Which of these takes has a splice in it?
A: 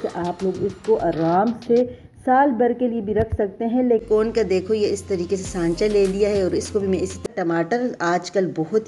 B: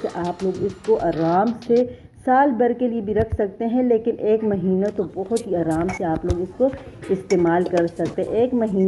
A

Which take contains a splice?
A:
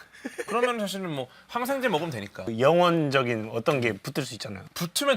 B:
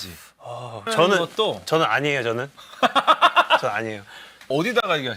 A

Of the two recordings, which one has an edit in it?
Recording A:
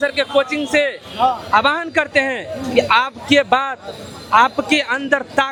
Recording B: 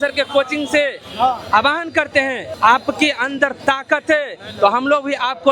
B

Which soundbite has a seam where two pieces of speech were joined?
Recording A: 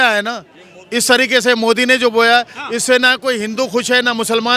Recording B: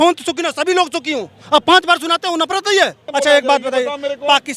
B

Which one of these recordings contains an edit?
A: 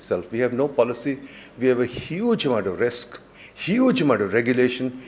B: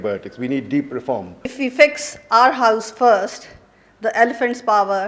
B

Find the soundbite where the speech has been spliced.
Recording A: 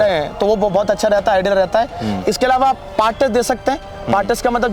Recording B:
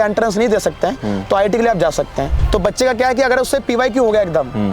B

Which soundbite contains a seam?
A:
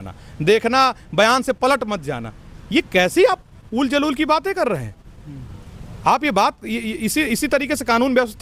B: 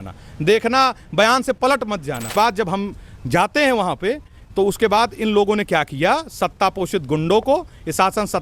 B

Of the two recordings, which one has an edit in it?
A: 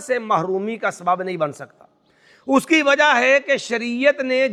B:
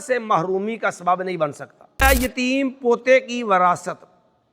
B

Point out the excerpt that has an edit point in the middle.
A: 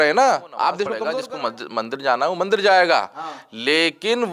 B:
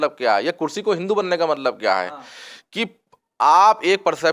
A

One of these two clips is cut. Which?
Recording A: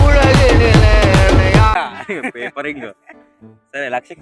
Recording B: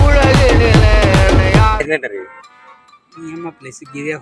A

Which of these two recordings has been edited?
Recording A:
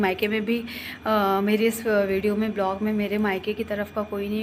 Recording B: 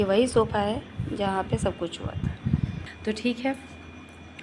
B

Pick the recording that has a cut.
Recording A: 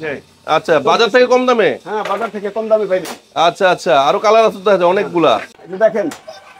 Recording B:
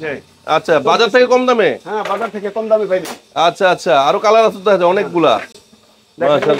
A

